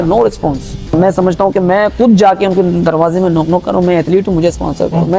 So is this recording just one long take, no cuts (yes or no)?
no